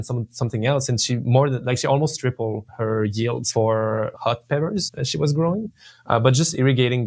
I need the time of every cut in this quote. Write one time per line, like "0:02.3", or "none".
0:02.7
0:03.4
0:04.1
0:05.0